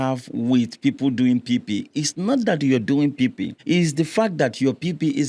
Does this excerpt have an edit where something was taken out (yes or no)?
yes